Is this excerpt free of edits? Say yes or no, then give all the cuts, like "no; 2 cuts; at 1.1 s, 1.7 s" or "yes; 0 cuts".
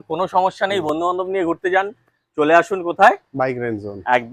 yes; 0 cuts